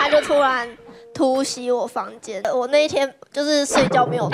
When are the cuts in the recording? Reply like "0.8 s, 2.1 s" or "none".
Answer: 2.5 s